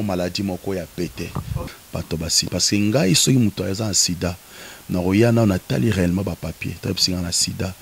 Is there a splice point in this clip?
yes; 1 cut; at 1.7 s

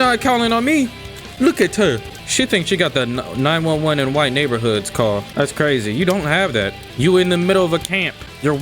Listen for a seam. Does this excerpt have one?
yes; 2 cuts; at 2.1 s, 6.8 s

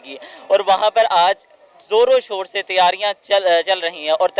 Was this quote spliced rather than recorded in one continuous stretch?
no; 0 cuts

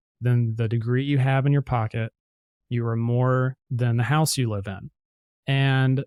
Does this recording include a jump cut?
no; 0 cuts

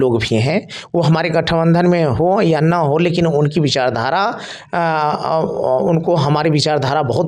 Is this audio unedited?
yes; 0 cuts

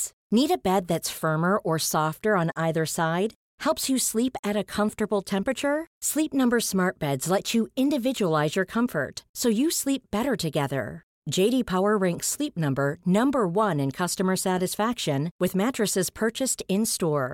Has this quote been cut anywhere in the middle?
no; 0 cuts

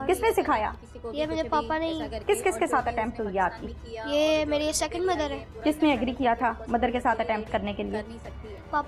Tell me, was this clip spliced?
yes; 2 cuts; at 2.2 s, 5.5 s

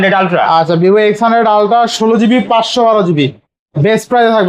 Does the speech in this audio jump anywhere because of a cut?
no; 0 cuts

